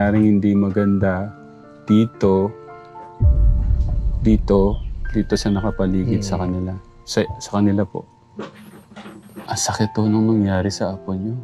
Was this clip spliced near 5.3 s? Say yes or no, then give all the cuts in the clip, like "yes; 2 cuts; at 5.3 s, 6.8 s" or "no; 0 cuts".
no; 1 cut; at 9.4 s